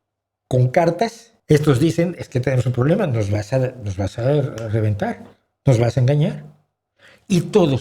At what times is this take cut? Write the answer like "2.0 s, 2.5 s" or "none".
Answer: 1.3 s